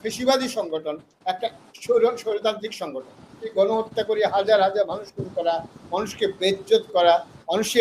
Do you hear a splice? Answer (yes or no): yes